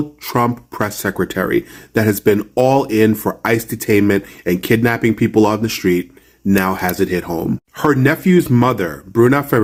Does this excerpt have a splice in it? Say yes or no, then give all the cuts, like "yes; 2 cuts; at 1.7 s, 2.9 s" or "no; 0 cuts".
no; 0 cuts